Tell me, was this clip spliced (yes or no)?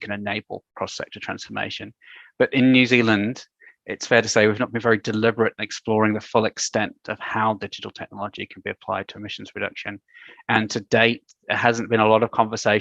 no